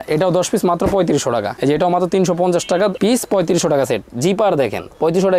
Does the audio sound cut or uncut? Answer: uncut